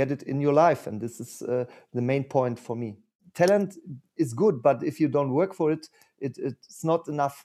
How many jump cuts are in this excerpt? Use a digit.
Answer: 1